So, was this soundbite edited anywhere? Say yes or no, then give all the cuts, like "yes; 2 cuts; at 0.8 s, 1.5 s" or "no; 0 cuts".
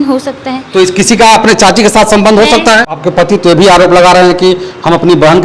yes; 1 cut; at 2.8 s